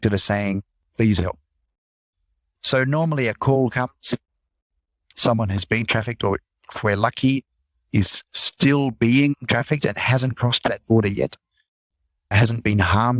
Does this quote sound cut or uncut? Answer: cut